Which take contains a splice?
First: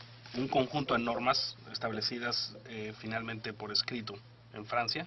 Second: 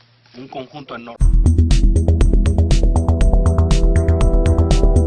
first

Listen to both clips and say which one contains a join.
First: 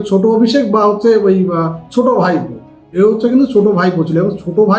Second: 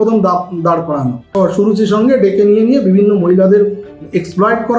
second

